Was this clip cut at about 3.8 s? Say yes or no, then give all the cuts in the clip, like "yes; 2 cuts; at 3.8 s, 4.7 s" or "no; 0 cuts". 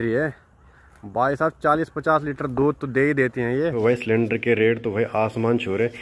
yes; 1 cut; at 3.8 s